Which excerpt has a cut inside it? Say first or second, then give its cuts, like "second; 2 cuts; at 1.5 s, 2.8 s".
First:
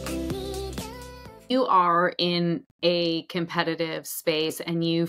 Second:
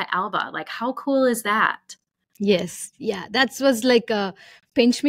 first; 1 cut; at 1.5 s